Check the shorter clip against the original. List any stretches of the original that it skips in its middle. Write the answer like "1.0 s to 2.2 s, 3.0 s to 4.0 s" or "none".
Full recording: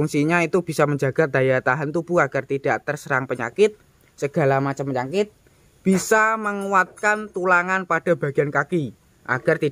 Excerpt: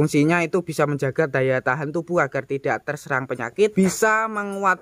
3.7 s to 5.8 s